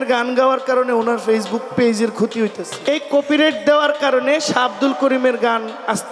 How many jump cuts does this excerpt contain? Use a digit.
1